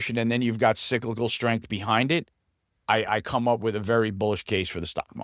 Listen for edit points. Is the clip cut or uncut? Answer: uncut